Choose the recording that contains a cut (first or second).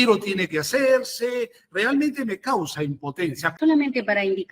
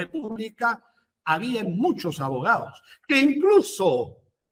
first